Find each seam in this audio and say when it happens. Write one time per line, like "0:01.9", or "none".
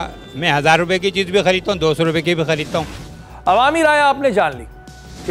none